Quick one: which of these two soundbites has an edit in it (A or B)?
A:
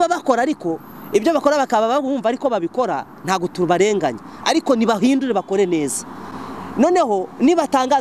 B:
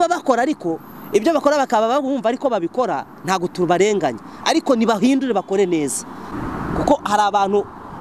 B